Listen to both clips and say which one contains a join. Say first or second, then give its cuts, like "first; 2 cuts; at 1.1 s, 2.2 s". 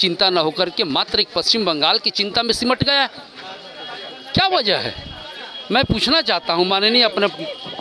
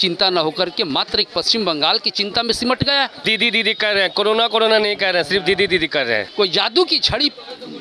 second; 2 cuts; at 3.2 s, 6.3 s